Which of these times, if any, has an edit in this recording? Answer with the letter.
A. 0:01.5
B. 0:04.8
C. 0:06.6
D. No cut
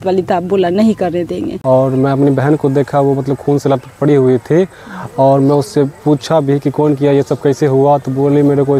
A